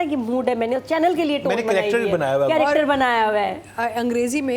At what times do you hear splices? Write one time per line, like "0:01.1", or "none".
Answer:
none